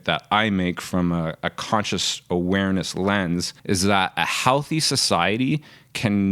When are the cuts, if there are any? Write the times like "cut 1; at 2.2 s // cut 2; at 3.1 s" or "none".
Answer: cut 1; at 3.5 s